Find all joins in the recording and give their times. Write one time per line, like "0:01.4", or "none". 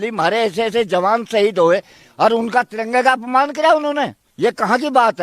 0:04.2